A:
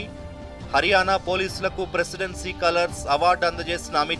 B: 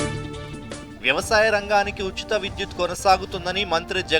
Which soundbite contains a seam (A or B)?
B